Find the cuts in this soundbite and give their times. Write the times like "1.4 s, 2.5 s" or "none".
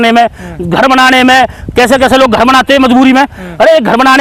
none

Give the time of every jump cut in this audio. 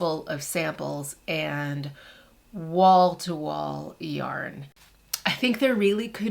4.8 s

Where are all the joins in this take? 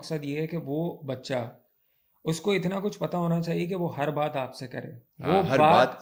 none

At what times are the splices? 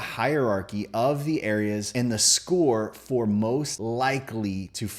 none

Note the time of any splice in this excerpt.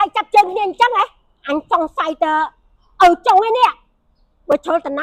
none

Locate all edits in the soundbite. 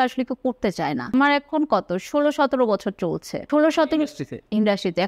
1.1 s, 3.3 s

